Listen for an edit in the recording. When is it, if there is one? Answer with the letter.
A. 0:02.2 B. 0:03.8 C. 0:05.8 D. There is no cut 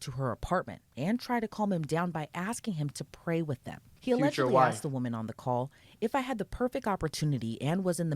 B